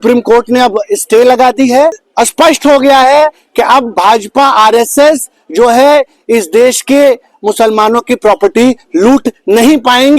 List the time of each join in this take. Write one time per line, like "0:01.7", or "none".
0:02.0